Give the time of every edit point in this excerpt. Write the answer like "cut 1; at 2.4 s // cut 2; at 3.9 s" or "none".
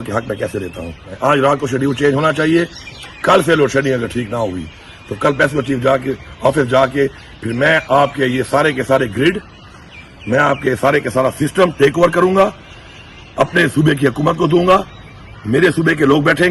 cut 1; at 1.1 s